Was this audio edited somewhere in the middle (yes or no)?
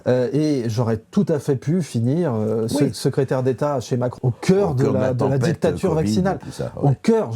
yes